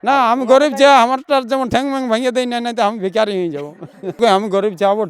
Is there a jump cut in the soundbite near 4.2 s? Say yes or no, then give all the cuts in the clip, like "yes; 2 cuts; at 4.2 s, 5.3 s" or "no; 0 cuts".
yes; 1 cut; at 4.2 s